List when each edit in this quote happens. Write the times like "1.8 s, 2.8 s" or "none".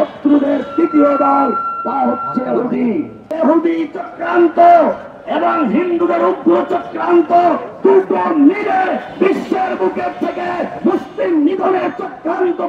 3.3 s